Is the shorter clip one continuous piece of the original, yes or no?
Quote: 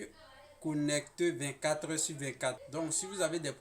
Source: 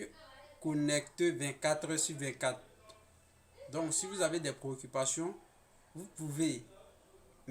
no